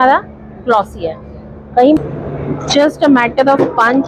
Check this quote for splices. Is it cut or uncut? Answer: cut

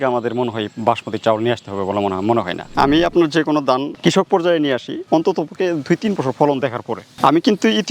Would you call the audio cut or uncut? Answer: cut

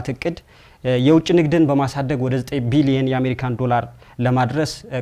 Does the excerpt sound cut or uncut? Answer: uncut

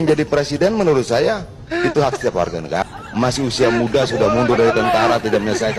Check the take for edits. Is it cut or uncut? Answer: cut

